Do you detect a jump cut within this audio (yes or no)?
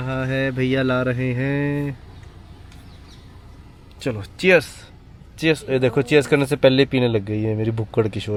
no